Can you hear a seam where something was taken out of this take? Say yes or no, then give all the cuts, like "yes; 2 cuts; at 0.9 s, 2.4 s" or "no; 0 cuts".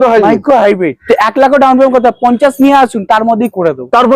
yes; 1 cut; at 0.9 s